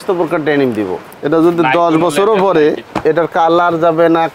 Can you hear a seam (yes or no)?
yes